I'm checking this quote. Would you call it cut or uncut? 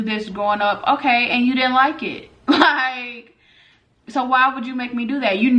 uncut